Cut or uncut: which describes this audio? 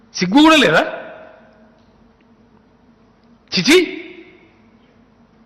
uncut